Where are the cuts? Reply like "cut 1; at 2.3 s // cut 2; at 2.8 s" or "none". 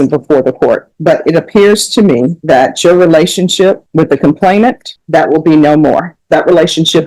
cut 1; at 0.9 s // cut 2; at 2.4 s // cut 3; at 3.8 s // cut 4; at 4.9 s // cut 5; at 6.1 s